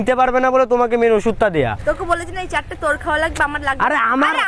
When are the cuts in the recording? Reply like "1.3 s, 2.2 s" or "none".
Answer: 1.8 s